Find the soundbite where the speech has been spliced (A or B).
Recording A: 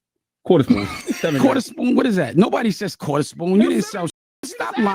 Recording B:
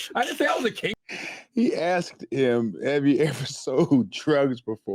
B